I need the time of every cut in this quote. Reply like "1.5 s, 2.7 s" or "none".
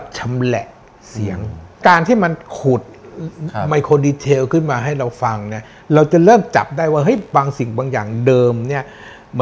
1.8 s